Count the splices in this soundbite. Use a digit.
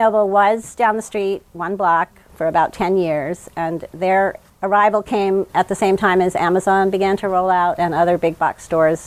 0